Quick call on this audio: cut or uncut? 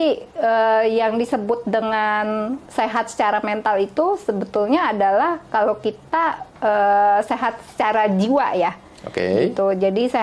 uncut